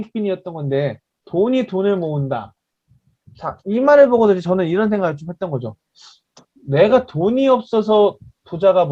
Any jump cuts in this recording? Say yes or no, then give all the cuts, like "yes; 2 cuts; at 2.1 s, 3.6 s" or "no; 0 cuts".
no; 0 cuts